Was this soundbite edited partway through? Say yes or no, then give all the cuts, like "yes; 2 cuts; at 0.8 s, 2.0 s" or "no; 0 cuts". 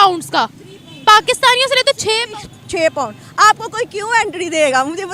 no; 0 cuts